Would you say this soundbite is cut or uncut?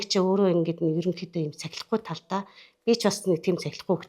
uncut